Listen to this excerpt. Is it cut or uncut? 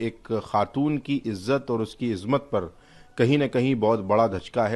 uncut